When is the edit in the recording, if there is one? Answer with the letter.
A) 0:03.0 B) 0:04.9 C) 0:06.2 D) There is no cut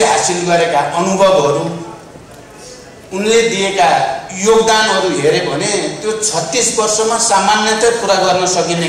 D